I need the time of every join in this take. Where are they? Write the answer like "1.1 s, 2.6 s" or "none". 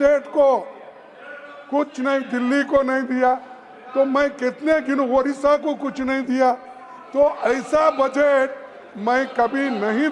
none